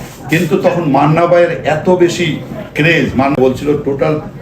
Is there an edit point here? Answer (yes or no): yes